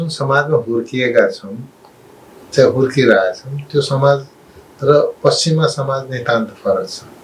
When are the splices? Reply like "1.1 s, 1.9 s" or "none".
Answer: none